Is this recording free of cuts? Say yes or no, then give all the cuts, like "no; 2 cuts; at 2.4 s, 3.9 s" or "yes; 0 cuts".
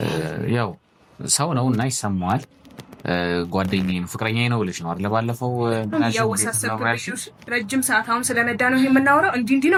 yes; 0 cuts